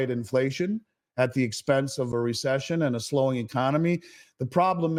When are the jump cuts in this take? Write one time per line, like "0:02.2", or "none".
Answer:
none